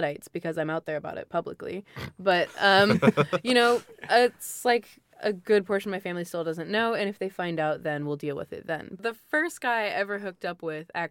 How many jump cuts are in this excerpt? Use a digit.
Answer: 1